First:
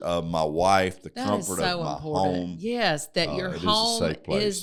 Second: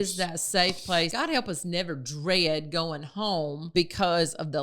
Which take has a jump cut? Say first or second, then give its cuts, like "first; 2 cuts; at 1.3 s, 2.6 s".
second; 2 cuts; at 1.1 s, 3.7 s